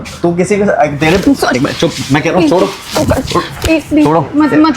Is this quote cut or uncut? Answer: uncut